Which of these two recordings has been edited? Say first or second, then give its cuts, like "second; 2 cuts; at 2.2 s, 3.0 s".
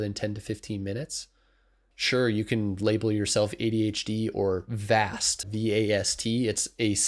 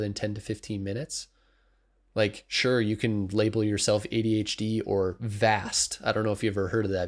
first; 2 cuts; at 1.9 s, 5.5 s